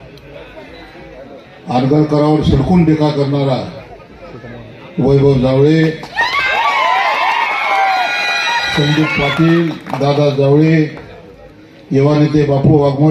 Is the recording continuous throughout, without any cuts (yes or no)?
yes